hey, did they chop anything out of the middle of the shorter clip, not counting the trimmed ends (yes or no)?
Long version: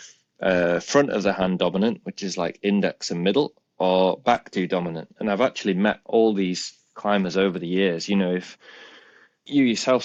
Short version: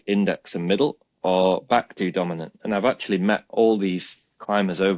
no